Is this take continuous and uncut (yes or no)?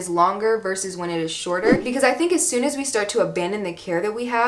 no